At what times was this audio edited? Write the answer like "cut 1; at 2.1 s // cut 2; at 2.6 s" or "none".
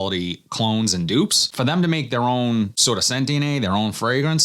cut 1; at 1.5 s // cut 2; at 2.8 s